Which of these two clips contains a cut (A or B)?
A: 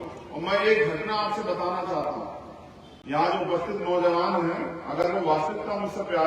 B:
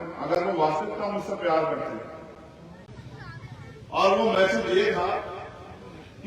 B